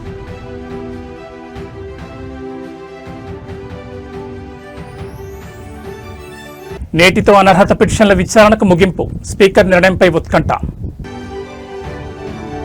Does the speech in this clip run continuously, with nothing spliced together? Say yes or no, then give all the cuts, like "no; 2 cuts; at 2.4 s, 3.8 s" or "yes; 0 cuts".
yes; 0 cuts